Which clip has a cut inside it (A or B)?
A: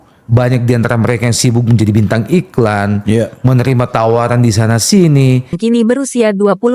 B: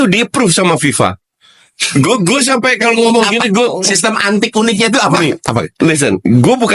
A